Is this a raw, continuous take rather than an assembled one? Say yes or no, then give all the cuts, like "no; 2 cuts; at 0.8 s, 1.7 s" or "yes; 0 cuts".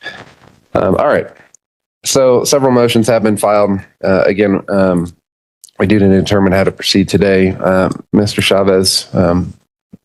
yes; 0 cuts